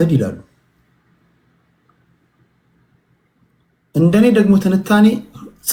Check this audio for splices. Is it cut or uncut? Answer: uncut